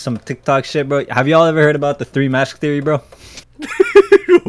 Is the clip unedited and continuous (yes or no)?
yes